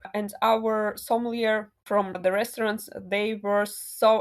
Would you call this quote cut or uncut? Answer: cut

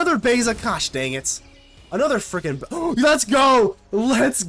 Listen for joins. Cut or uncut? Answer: uncut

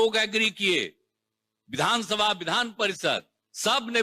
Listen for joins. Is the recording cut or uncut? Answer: uncut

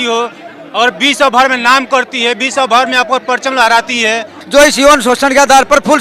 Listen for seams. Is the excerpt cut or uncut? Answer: cut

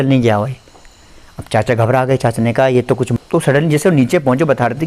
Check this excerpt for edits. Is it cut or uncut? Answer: cut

